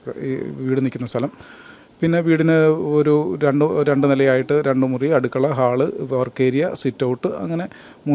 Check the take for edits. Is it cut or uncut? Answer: uncut